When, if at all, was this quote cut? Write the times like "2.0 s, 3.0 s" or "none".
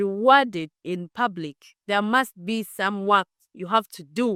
none